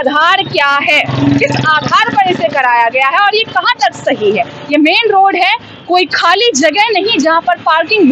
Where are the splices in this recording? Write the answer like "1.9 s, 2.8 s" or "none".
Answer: none